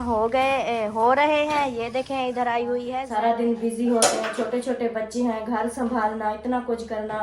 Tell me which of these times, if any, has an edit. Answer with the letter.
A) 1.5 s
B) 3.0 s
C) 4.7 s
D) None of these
B